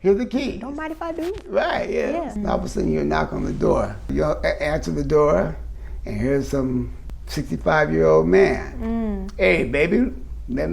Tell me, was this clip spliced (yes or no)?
yes